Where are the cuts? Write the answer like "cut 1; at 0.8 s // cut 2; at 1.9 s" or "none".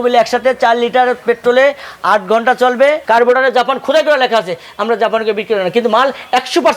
cut 1; at 3.0 s